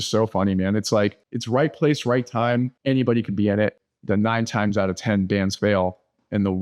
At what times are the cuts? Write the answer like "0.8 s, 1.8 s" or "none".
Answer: 1.3 s, 2.7 s, 3.8 s